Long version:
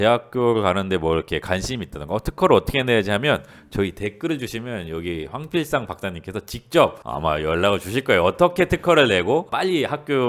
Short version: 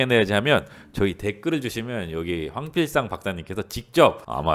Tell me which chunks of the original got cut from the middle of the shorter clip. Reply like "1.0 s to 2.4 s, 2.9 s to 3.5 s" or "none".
none